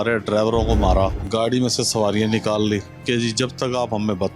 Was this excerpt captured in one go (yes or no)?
no